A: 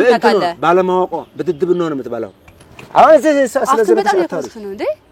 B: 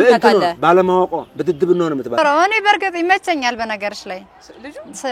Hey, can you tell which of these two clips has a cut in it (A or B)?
B